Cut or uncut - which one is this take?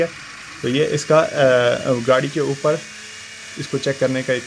uncut